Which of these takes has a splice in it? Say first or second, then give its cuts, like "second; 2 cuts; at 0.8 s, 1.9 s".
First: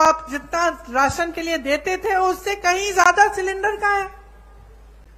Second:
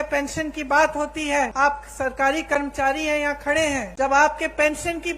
second; 2 cuts; at 1.5 s, 3.9 s